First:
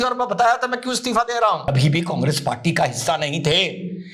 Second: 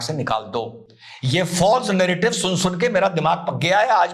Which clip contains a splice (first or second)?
first